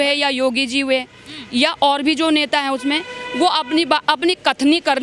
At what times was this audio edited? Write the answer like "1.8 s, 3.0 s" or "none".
none

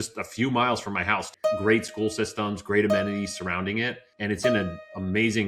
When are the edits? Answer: 1.3 s, 4.2 s

